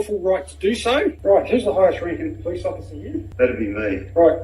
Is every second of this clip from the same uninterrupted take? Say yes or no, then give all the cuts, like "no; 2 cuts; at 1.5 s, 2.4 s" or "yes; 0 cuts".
no; 2 cuts; at 1.2 s, 3.3 s